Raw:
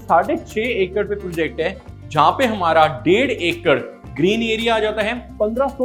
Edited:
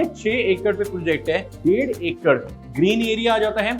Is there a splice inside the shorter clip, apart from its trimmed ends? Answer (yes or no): yes